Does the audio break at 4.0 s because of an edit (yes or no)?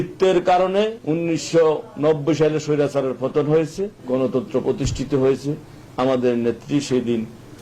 yes